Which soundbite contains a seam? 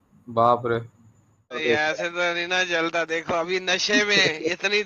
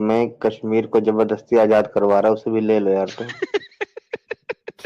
first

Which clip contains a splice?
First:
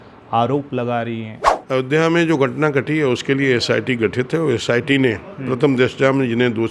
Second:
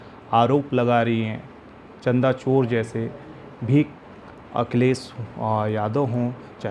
first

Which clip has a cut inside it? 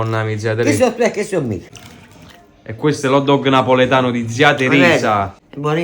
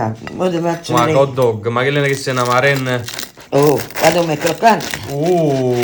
first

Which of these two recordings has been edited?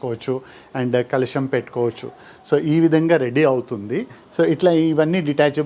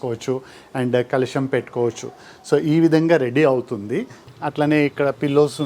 second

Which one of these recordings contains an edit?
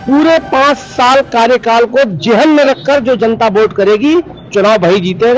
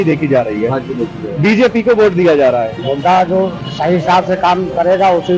second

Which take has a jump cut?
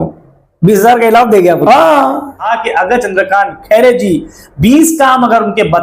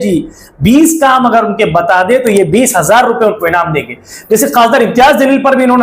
first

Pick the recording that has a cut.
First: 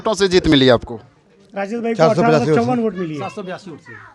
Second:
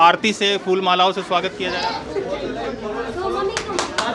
second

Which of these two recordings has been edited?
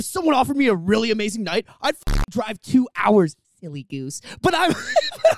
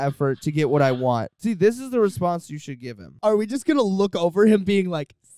second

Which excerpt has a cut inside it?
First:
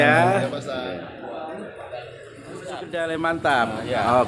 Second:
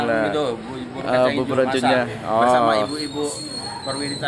first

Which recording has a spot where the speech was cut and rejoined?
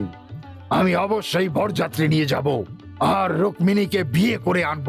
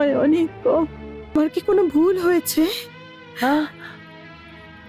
second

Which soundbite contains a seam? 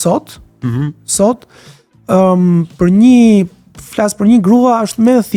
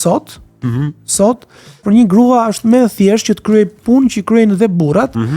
second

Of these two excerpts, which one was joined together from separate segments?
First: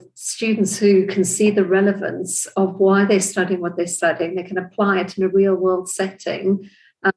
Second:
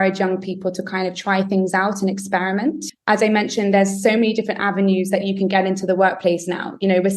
second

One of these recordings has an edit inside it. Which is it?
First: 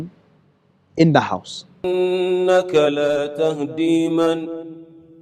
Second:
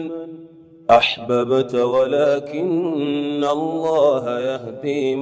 first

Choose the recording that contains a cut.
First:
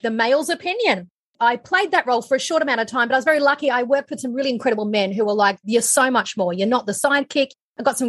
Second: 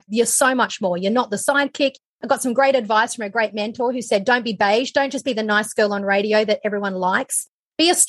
first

